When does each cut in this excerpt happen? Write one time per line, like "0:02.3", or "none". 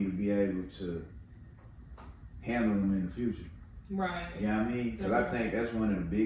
none

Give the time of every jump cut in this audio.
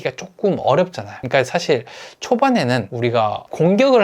0:02.9

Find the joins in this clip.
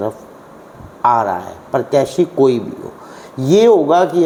none

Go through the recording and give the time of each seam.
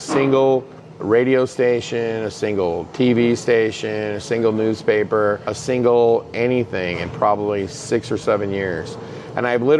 0:01.0
0:05.6

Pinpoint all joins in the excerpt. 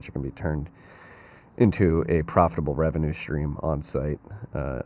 none

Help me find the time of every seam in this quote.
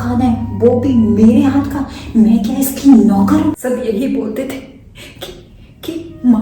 0:03.6

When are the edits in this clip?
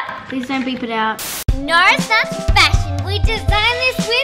0:01.4

